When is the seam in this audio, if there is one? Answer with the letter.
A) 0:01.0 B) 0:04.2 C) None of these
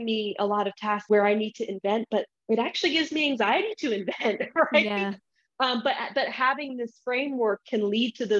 A